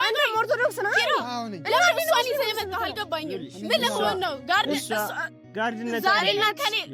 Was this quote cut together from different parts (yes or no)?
no